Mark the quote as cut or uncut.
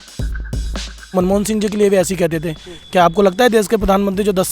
cut